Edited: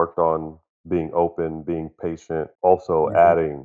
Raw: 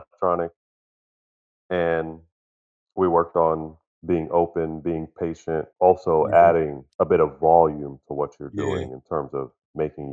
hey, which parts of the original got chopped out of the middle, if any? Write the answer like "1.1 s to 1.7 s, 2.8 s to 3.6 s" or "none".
none

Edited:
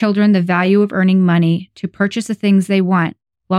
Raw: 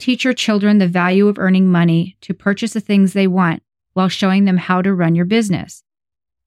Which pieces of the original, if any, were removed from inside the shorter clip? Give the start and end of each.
none

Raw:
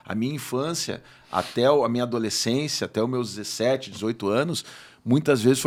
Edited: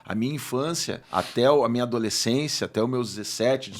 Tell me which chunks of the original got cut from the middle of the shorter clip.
1.0 s to 1.2 s

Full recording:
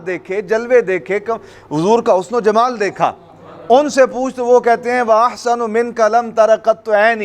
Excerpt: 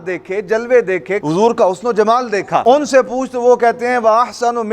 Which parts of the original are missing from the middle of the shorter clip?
1.2 s to 1.7 s, 3.1 s to 3.7 s

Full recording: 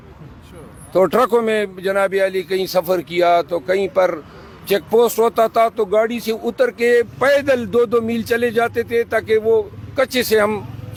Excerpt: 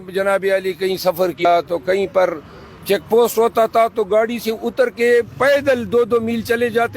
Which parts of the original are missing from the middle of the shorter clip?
3.1 s to 3.3 s

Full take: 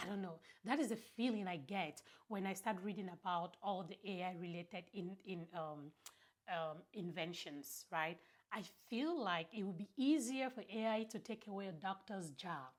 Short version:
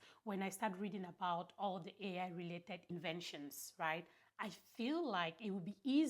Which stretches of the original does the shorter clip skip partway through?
4.9 s to 7.0 s

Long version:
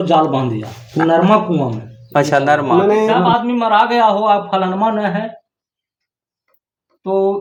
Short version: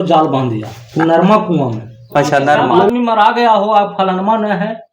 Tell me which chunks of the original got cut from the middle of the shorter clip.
2.9 s to 3.4 s

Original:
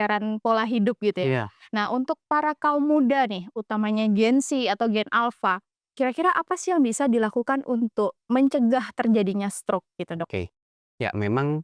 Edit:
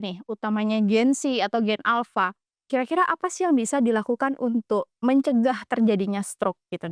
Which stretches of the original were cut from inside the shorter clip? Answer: none

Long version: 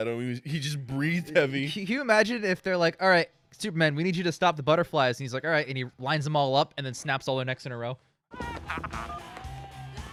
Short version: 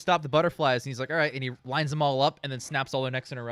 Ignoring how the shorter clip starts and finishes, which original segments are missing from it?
none

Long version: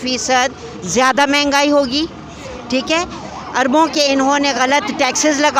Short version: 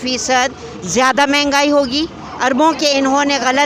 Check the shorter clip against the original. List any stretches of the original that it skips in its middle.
2.2 s to 3.4 s

